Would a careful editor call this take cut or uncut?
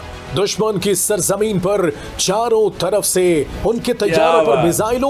uncut